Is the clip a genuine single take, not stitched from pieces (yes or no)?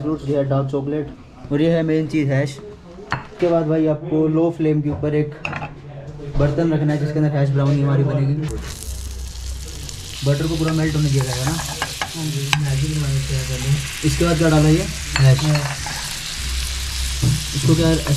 yes